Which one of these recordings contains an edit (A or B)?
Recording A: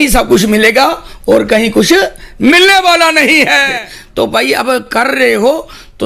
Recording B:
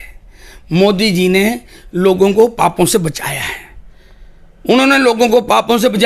A